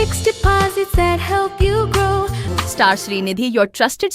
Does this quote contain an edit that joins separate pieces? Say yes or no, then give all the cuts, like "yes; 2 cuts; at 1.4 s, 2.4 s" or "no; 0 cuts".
yes; 1 cut; at 2.5 s